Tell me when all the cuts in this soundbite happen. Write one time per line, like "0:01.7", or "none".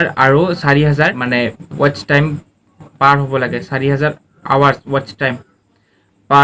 0:01.2